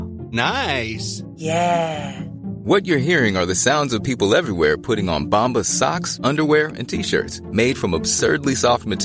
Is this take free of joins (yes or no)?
yes